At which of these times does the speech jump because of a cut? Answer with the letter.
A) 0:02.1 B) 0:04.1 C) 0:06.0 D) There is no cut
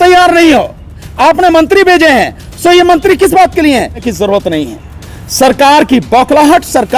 B